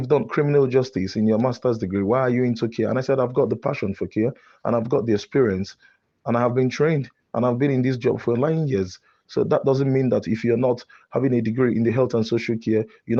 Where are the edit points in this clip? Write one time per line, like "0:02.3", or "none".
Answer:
none